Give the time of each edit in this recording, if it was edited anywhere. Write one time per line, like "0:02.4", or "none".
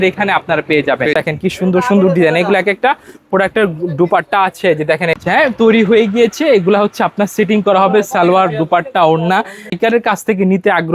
0:01.1
0:05.2
0:09.7